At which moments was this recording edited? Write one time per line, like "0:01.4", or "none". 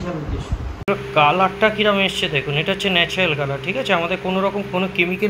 0:00.9